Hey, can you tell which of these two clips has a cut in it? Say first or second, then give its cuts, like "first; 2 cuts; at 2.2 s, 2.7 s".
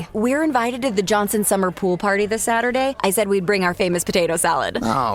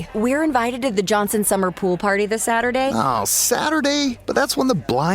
second; 1 cut; at 2.9 s